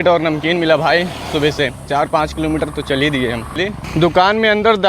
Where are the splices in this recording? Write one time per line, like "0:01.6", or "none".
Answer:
0:03.5